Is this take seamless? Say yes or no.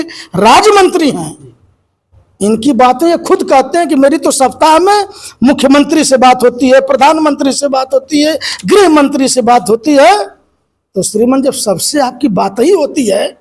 yes